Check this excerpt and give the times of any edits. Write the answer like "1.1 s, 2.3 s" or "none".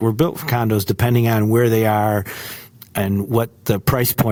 none